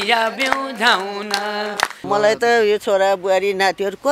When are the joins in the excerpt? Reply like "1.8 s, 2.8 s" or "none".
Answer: 2.0 s